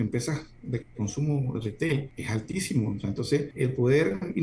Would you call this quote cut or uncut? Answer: cut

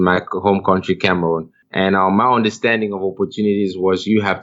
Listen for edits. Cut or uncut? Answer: cut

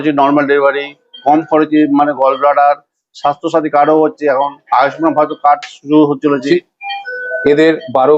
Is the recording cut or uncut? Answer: cut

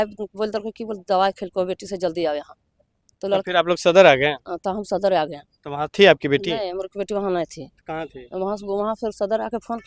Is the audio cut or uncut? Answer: uncut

